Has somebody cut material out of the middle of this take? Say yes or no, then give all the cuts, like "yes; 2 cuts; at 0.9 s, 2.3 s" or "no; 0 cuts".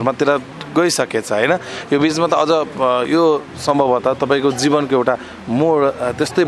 no; 0 cuts